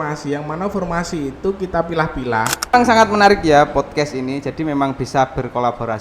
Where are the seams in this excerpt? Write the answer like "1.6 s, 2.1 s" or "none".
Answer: 2.7 s

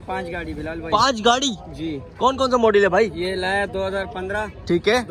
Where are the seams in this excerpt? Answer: none

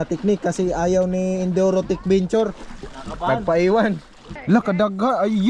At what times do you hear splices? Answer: 4.3 s

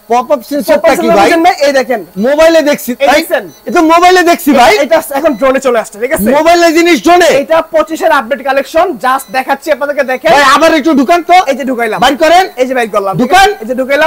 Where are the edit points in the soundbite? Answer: none

